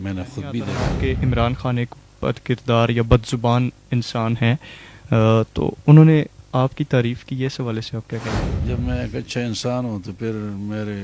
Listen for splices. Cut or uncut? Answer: cut